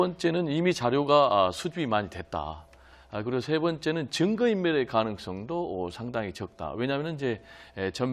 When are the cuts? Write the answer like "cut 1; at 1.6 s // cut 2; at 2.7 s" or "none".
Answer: none